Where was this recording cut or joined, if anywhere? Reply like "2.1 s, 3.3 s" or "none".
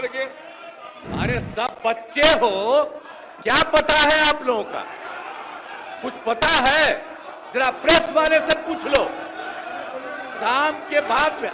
0.9 s